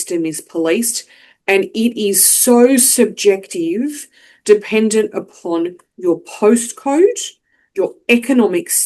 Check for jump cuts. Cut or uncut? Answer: uncut